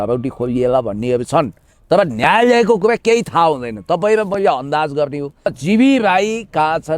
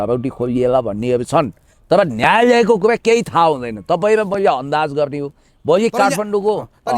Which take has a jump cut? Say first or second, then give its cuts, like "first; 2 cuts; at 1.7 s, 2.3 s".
first; 1 cut; at 5.6 s